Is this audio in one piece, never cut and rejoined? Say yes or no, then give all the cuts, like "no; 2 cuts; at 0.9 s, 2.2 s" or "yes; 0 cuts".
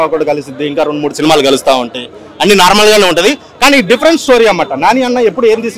yes; 0 cuts